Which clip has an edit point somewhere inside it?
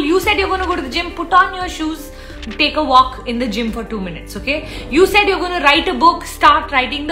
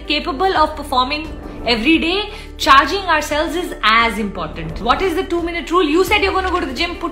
second; 1 cut; at 4.8 s

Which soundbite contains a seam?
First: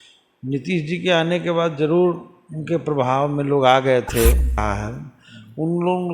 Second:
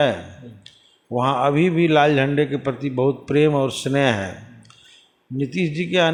first; 1 cut; at 4.6 s

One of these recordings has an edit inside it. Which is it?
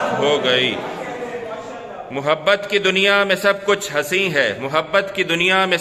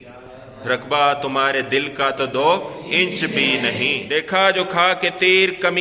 second; 1 cut; at 4.0 s

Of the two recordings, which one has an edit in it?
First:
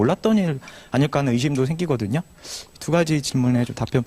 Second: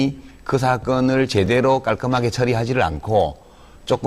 first; 1 cut; at 1.9 s

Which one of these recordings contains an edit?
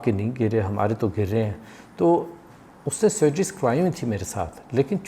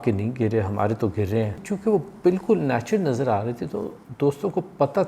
second; 1 cut; at 1.7 s

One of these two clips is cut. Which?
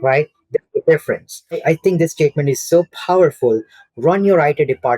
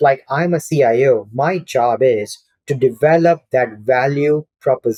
first; 1 cut; at 1.6 s

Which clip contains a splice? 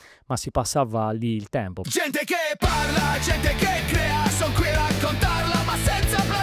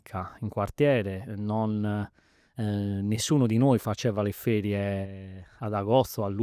first; 1 cut; at 1.8 s

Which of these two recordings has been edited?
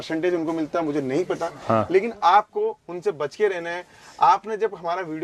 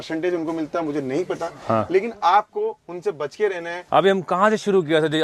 second; 1 cut; at 3.8 s

